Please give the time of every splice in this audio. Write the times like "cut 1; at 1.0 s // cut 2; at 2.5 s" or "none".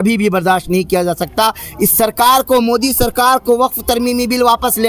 none